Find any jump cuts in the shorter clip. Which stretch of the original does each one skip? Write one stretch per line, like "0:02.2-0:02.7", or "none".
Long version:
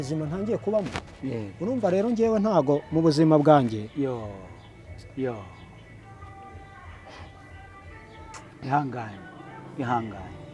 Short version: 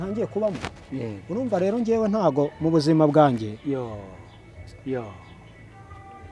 none